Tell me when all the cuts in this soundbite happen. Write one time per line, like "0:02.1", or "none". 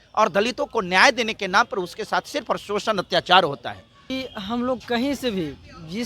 0:04.1